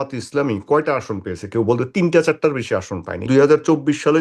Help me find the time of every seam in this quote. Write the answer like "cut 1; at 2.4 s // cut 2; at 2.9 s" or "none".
cut 1; at 3.3 s